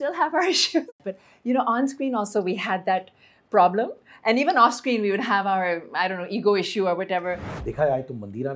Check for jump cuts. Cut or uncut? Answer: cut